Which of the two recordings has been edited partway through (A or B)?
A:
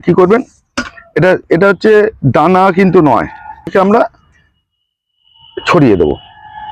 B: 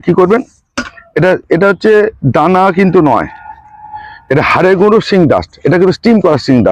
A